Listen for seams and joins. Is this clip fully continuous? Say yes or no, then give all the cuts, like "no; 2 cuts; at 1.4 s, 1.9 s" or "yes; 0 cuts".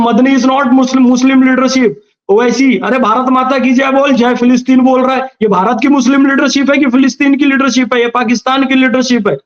yes; 0 cuts